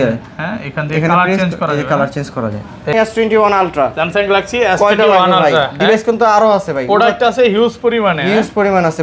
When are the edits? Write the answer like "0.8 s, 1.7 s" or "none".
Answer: 2.9 s